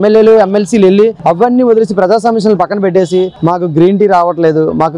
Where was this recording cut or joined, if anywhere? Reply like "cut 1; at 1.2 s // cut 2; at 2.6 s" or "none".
none